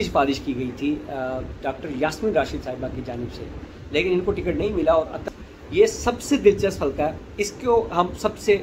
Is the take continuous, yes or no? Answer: no